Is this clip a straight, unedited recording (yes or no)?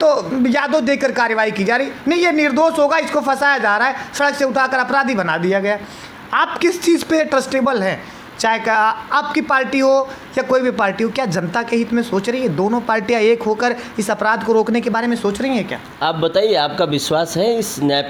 yes